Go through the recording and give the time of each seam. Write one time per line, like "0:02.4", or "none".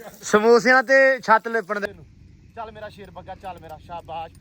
0:01.8

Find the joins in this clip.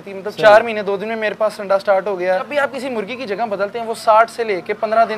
0:02.5

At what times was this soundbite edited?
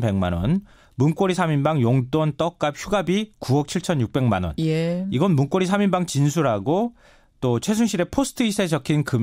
0:06.6

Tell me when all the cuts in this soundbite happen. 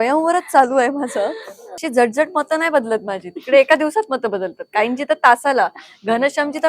0:01.7

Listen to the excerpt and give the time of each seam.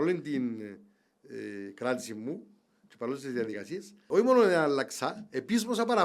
0:04.1

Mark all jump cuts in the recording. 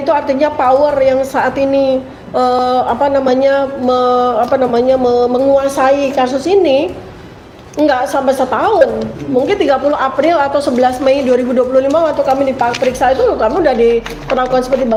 none

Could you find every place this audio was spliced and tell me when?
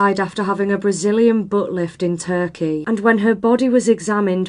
none

